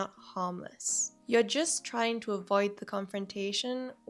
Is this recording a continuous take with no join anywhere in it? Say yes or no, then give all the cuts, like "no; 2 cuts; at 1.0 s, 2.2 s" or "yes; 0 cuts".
no; 1 cut; at 1.1 s